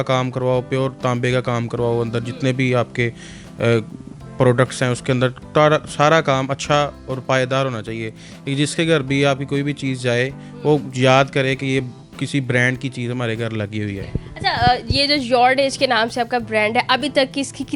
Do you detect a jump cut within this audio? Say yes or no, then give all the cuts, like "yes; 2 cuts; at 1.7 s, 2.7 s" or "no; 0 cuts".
no; 0 cuts